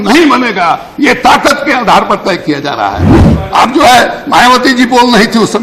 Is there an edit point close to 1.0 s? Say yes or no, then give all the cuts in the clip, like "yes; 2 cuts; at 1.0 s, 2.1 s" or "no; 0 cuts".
no; 1 cut; at 3.1 s